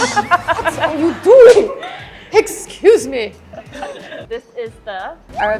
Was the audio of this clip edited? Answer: yes; 1 cut; at 4.1 s

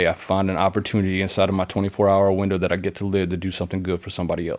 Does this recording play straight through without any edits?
yes; 0 cuts

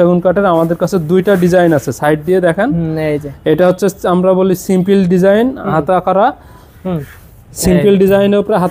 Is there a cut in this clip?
no; 0 cuts

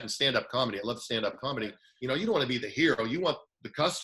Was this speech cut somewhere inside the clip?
yes; 1 cut; at 1.9 s

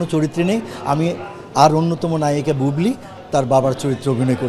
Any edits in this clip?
no; 0 cuts

